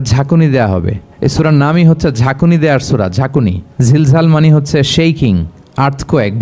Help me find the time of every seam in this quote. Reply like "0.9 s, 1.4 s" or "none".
1.0 s, 3.7 s